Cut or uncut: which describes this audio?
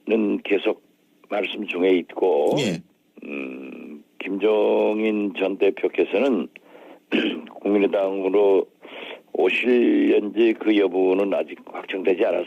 cut